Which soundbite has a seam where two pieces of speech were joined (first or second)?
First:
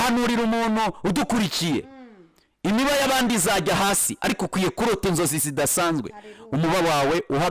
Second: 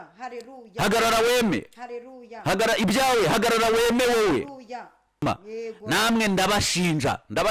second